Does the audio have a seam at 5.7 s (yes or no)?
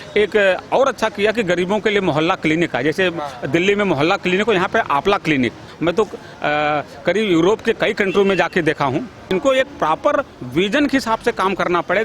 yes